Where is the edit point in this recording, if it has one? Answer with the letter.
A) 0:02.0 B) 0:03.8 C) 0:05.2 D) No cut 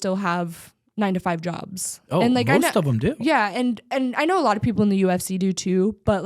D